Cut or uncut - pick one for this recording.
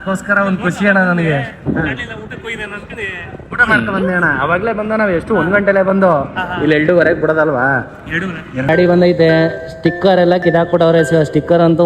cut